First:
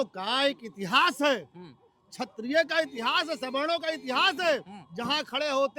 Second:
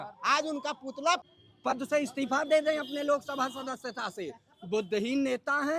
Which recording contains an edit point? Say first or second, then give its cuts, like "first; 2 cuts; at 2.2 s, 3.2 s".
second; 1 cut; at 1.2 s